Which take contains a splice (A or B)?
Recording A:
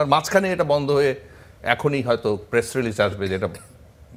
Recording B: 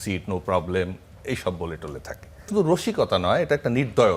B